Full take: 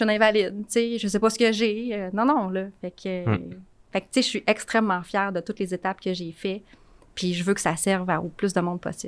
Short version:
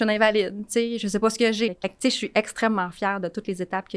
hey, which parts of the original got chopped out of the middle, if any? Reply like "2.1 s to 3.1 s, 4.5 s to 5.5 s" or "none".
1.7 s to 3.9 s